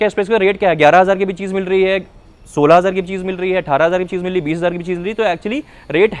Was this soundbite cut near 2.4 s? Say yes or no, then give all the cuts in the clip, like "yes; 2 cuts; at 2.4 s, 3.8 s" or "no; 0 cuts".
no; 0 cuts